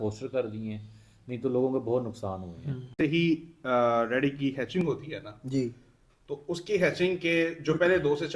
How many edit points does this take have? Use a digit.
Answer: 1